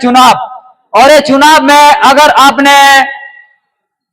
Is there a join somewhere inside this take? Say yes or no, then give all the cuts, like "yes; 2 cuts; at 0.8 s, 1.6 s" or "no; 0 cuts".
no; 0 cuts